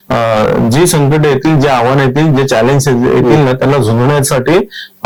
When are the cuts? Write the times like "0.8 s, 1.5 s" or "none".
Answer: none